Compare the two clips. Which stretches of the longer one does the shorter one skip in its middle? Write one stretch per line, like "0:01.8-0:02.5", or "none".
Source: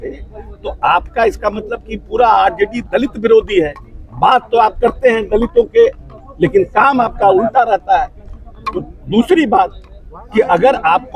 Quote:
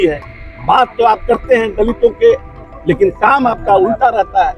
none